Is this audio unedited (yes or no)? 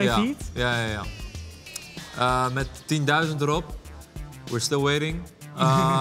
yes